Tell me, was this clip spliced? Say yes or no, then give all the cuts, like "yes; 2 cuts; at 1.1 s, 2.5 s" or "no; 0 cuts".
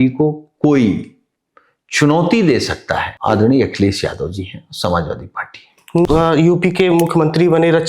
yes; 2 cuts; at 3.1 s, 6.1 s